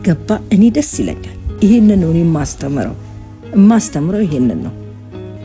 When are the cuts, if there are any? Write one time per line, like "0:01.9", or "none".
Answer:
none